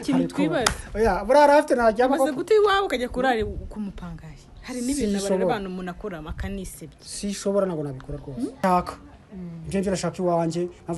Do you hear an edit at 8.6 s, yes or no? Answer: yes